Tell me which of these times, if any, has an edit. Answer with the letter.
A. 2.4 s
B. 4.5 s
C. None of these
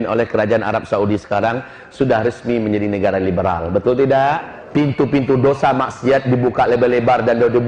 B